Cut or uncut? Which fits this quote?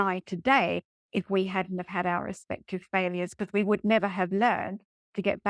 uncut